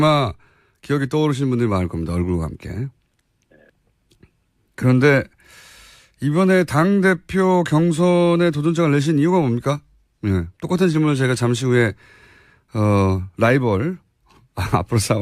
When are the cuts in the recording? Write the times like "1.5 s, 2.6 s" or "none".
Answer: 12.2 s